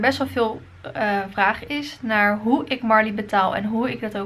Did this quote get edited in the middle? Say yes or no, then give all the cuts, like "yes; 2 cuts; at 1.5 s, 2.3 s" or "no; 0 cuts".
no; 0 cuts